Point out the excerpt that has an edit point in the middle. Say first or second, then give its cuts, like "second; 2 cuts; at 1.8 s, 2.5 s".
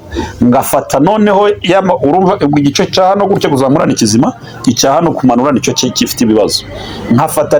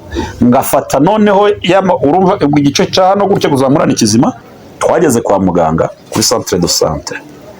second; 1 cut; at 4.5 s